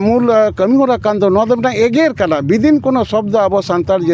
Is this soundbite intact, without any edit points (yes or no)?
yes